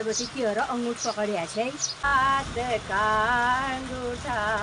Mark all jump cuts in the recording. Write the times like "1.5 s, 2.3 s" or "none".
2.0 s

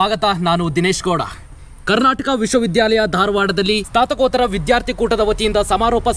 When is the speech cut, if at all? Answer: 3.8 s

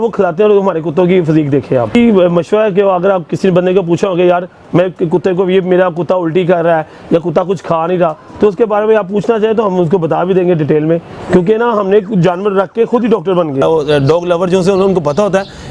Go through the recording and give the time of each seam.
1.9 s, 13.6 s

